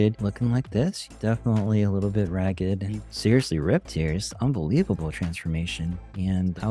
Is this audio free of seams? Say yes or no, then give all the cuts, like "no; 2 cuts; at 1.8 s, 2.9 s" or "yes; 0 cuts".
no; 2 cuts; at 1.1 s, 3.1 s